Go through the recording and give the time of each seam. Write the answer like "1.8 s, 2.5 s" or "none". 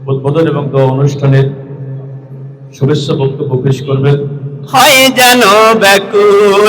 4.6 s